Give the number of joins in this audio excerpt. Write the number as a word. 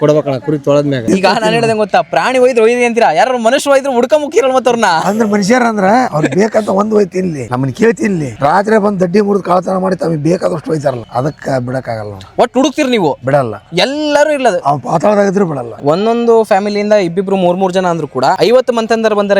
two